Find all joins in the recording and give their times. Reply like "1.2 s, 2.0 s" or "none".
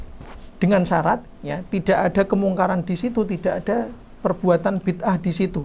1.2 s